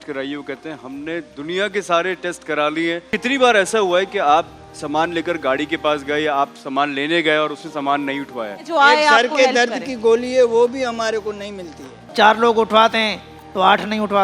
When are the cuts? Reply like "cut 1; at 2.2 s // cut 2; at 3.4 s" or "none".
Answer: cut 1; at 3.1 s // cut 2; at 8.6 s // cut 3; at 12.0 s

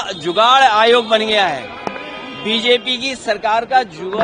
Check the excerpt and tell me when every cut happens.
none

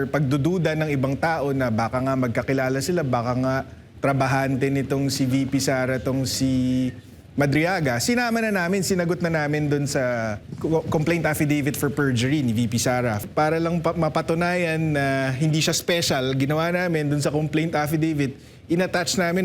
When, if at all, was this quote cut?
cut 1; at 10.4 s // cut 2; at 13.2 s

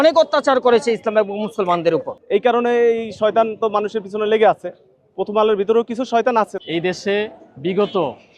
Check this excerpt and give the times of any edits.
cut 1; at 2.1 s // cut 2; at 6.5 s

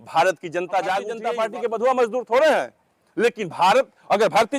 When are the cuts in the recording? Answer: cut 1; at 1.2 s

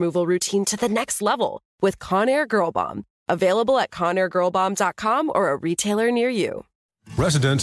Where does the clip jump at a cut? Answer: cut 1; at 6.7 s

